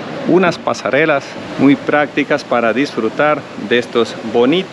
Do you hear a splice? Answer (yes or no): yes